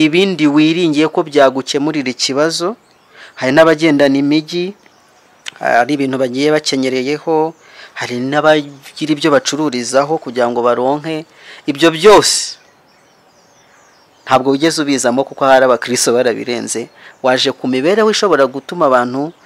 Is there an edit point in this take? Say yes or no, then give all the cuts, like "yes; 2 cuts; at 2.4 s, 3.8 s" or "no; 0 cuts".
no; 0 cuts